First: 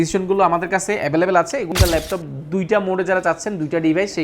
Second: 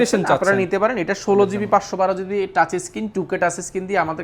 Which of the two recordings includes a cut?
first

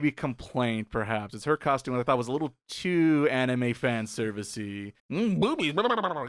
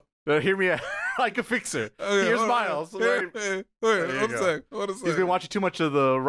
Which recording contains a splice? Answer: first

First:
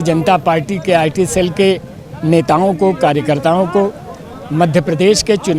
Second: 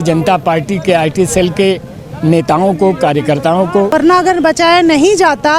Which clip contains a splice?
second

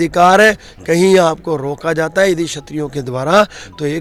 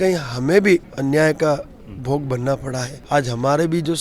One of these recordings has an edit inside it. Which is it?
second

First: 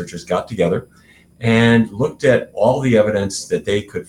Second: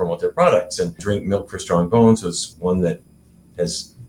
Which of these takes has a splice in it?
second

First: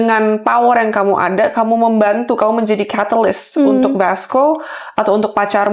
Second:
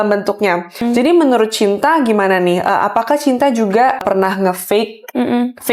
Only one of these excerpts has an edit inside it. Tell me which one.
second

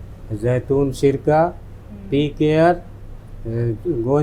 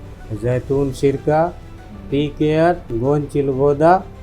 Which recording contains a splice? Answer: second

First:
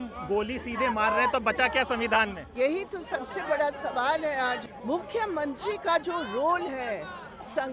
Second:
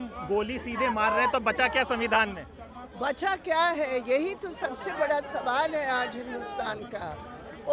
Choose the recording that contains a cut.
first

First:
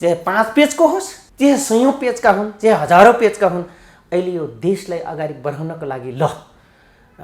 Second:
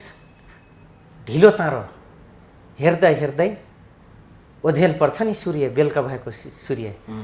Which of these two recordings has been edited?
first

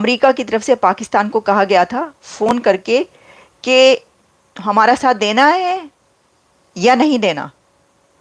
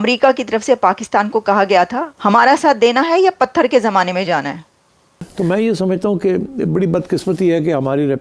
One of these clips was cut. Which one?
second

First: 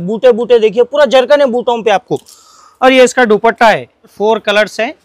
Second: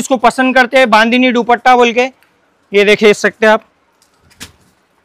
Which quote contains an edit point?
first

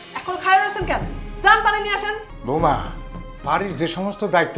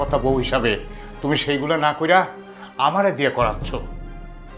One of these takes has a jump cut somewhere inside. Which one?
first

